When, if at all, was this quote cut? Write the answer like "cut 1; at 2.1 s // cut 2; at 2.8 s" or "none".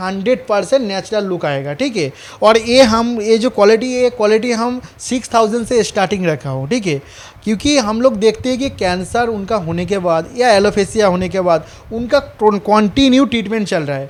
none